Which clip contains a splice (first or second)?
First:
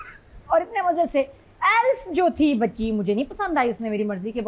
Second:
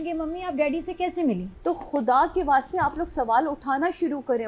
second